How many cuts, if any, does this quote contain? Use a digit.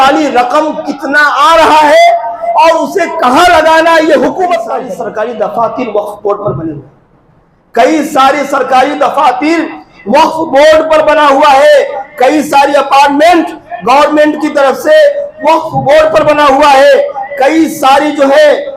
1